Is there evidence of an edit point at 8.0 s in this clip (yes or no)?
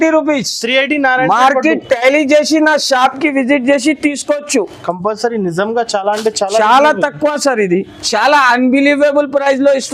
yes